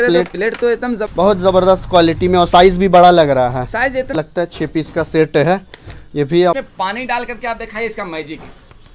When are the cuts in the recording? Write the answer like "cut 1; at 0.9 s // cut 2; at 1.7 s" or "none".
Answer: cut 1; at 1.0 s // cut 2; at 4.1 s // cut 3; at 6.6 s